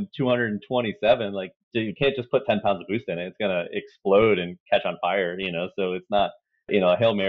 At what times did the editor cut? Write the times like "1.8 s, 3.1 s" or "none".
1.5 s